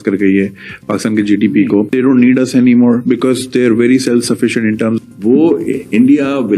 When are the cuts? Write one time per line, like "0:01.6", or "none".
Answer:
0:01.9
0:05.0